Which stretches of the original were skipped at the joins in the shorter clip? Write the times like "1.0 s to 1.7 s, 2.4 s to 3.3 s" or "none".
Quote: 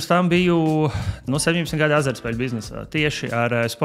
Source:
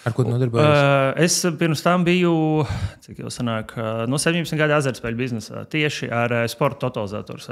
3.0 s to 4.0 s